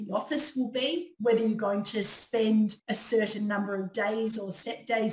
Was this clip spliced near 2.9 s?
yes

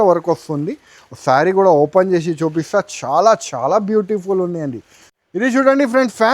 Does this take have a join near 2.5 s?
no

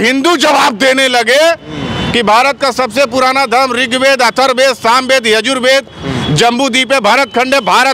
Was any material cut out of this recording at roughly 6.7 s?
no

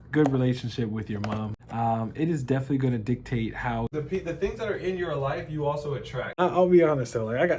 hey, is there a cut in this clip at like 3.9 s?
yes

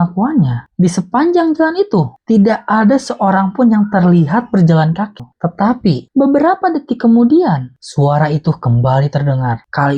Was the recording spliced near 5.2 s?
yes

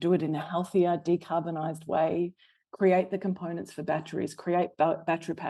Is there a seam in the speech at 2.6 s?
no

